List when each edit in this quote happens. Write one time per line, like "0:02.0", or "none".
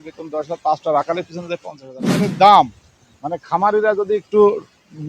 0:02.3

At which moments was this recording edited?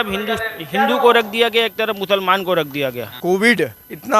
0:03.1

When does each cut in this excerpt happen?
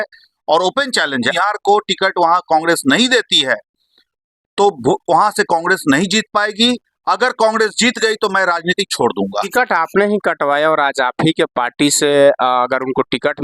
0:01.3
0:09.5

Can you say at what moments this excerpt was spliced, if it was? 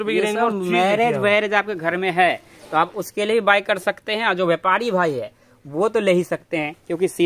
none

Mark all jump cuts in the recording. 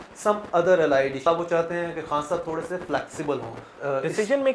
0:01.3
0:03.6

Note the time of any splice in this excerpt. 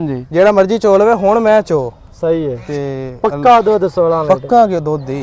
none

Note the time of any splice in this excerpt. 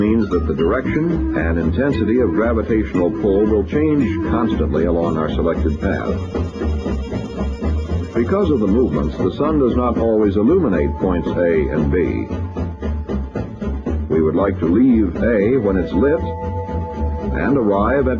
0:13.5

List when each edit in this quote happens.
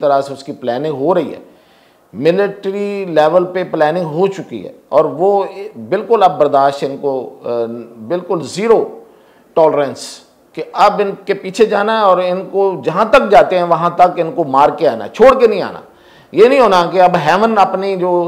none

